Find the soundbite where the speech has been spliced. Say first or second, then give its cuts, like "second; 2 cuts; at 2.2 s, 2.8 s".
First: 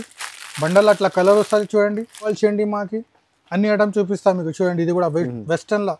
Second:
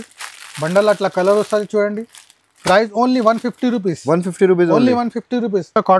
first; 1 cut; at 2.3 s